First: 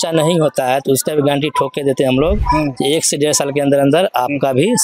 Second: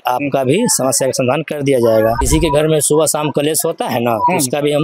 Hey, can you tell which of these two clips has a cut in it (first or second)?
second